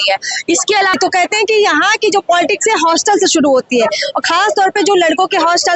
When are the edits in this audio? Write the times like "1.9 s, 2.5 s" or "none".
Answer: 1.0 s